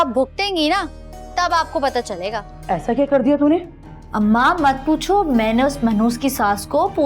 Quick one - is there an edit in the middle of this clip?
yes; 1 cut; at 2.5 s

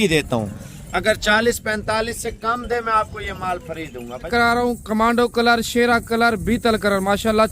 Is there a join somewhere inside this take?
yes; 1 cut; at 4.3 s

